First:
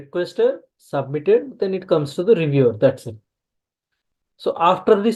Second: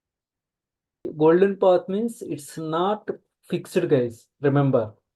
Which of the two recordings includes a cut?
second; 1 cut; at 1.1 s

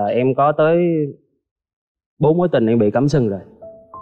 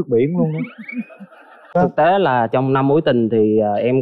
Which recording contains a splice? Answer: second; 1 cut; at 1.6 s

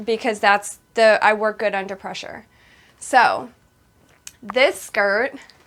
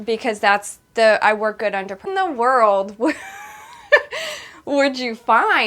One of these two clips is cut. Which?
second; 1 cut; at 2.0 s

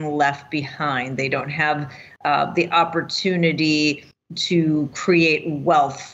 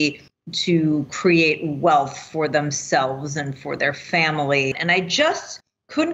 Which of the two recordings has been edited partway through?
second; 1 cut; at 4.8 s

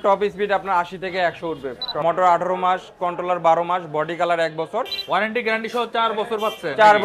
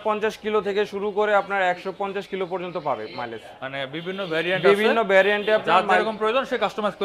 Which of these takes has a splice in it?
first; 2 cuts; at 2.0 s, 5.0 s

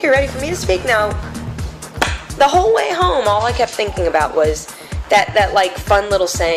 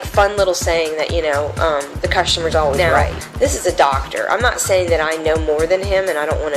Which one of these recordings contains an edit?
second; 1 cut; at 2.8 s

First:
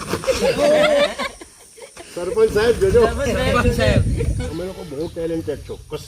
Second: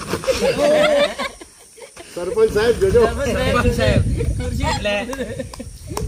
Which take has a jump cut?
first; 1 cut; at 4.4 s

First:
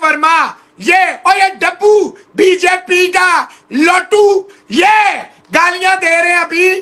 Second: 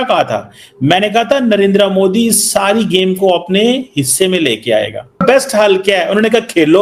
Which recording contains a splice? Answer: second; 1 cut; at 5.2 s

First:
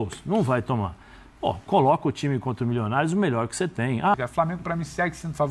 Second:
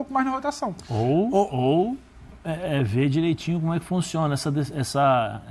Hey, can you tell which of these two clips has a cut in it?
first; 1 cut; at 4.1 s

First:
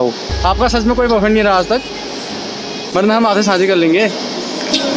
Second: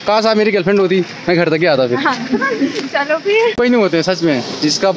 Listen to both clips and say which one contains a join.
second; 1 cut; at 3.6 s

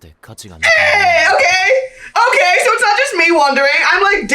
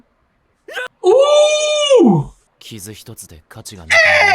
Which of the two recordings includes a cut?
second; 1 cut; at 2.4 s

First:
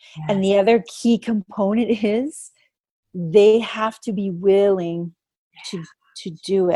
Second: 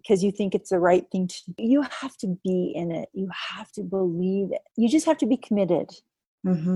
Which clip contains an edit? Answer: second; 2 cuts; at 1.4 s, 4.7 s

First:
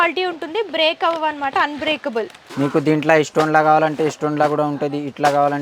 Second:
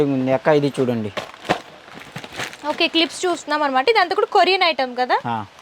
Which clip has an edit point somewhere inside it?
first; 1 cut; at 2.5 s

